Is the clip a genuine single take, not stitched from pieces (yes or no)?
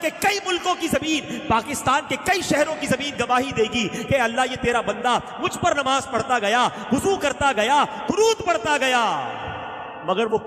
yes